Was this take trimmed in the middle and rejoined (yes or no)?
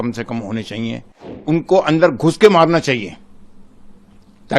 yes